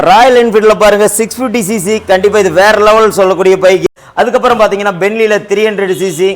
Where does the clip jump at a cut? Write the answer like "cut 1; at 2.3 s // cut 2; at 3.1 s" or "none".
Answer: cut 1; at 3.8 s

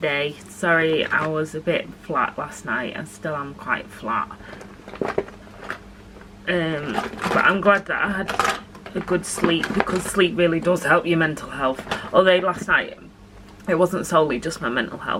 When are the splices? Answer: none

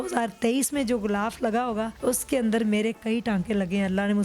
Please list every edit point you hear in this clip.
cut 1; at 1.9 s

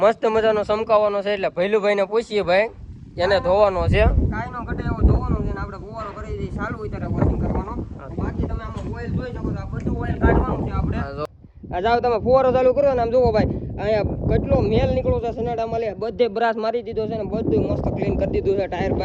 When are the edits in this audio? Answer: cut 1; at 11.3 s

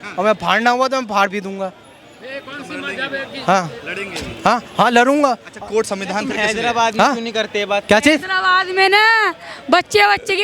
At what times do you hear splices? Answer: none

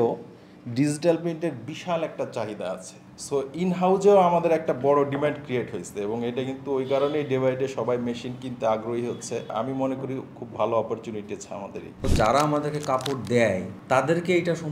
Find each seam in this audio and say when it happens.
none

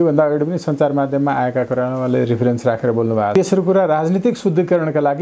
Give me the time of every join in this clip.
cut 1; at 3.3 s

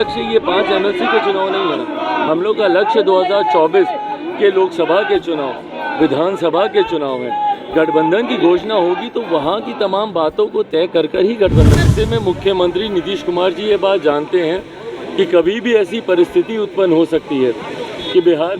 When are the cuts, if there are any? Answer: cut 1; at 11.9 s

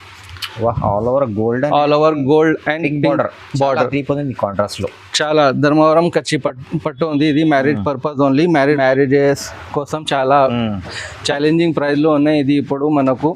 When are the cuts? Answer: cut 1; at 8.8 s

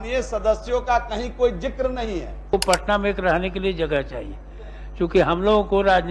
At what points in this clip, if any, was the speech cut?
cut 1; at 2.5 s

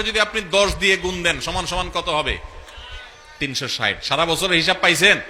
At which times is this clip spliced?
none

